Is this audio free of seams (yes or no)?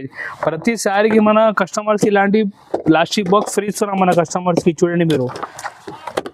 yes